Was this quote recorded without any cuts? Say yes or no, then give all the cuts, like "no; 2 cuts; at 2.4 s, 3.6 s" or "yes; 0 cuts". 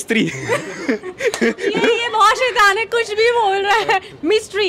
yes; 0 cuts